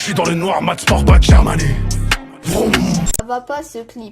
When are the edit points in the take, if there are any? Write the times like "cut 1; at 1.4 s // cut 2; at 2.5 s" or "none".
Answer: cut 1; at 3.2 s